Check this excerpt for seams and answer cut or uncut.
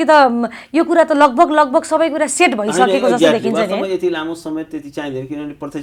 uncut